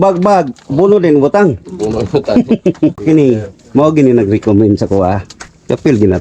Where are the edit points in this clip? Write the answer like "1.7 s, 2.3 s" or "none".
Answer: 3.0 s